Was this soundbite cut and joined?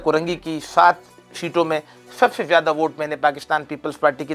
no; 0 cuts

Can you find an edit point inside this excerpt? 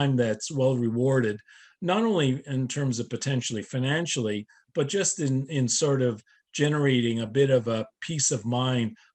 no; 0 cuts

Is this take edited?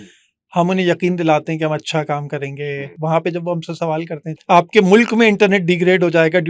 yes; 2 cuts; at 2.9 s, 4.3 s

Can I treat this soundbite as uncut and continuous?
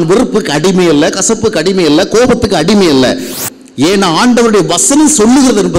no; 1 cut; at 3.3 s

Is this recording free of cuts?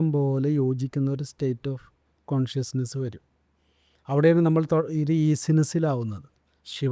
yes; 0 cuts

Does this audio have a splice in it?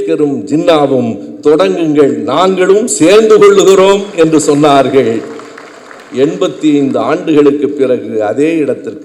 no; 0 cuts

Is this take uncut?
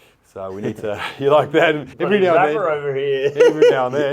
no; 1 cut; at 1.9 s

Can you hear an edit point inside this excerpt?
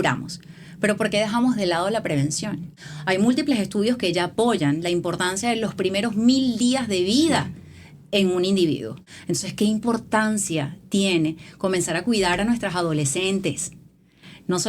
yes; 2 cuts; at 2.7 s, 8.9 s

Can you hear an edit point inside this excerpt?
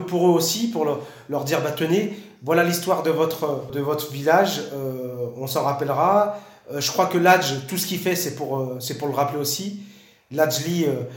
yes; 1 cut; at 3.7 s

